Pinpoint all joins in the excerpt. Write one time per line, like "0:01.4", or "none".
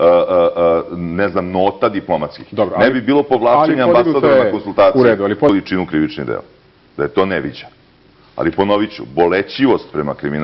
0:07.2